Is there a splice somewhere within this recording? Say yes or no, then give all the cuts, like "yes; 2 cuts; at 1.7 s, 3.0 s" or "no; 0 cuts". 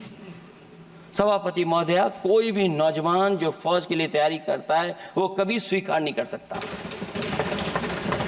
no; 0 cuts